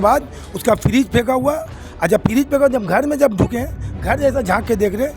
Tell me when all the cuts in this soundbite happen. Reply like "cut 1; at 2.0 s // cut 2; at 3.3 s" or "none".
none